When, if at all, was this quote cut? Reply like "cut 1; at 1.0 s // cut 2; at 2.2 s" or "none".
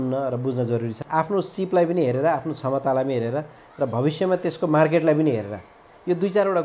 cut 1; at 1.0 s